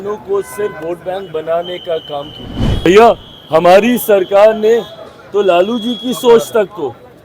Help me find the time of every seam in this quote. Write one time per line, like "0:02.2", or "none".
0:02.9